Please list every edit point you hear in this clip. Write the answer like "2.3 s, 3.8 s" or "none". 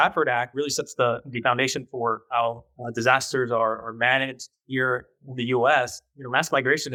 none

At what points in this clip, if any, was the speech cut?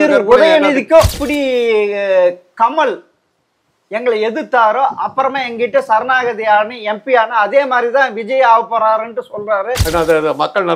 1.2 s, 9.8 s

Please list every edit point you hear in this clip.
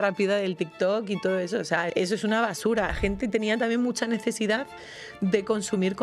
1.9 s, 2.9 s

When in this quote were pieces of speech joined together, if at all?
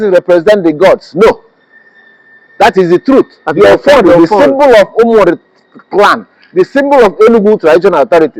none

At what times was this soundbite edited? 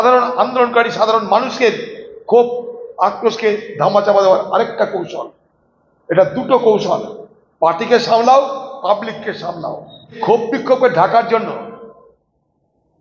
10.2 s

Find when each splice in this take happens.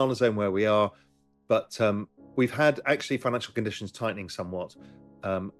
none

